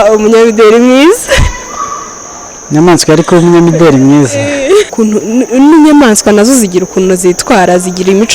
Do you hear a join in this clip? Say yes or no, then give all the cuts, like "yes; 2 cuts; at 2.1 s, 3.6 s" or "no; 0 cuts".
yes; 1 cut; at 4.9 s